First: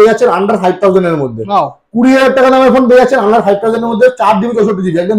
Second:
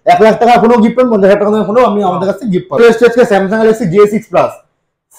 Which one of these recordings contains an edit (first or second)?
second